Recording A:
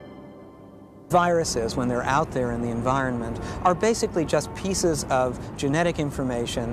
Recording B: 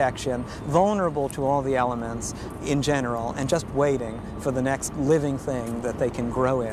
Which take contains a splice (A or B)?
A